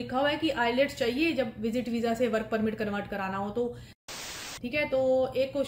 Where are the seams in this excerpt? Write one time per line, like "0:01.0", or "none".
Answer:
0:04.0